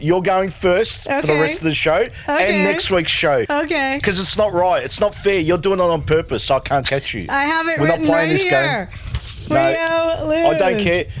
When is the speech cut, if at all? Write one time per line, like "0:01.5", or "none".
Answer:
0:03.8
0:07.3